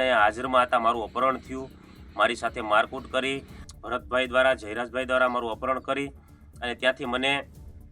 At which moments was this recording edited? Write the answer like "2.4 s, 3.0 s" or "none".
3.5 s